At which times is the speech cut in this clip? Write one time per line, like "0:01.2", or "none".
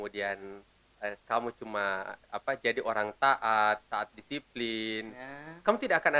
none